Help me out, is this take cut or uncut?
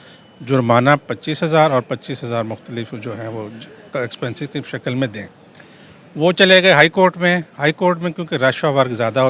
uncut